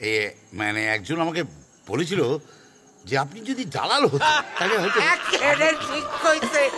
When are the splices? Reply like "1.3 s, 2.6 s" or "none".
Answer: none